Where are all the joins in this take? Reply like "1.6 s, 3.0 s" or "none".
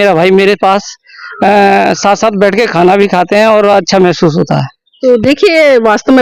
none